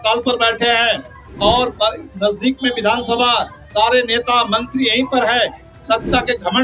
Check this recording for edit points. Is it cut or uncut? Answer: uncut